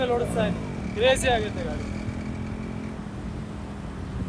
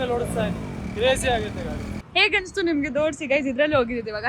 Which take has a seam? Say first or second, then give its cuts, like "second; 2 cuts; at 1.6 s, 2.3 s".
second; 1 cut; at 2.0 s